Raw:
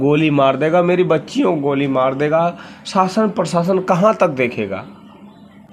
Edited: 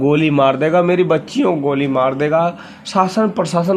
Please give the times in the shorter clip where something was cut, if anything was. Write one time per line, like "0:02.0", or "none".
none